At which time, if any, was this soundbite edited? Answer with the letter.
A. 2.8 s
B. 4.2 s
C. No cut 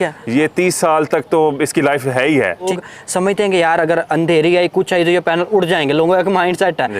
A